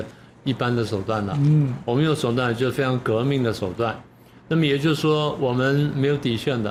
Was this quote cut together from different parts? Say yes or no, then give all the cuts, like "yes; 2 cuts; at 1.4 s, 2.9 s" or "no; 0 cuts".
no; 0 cuts